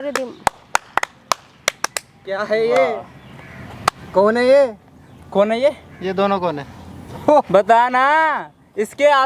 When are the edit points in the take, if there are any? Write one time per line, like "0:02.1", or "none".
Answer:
none